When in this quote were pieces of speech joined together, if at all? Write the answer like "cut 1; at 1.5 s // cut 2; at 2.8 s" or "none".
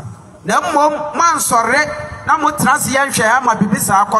none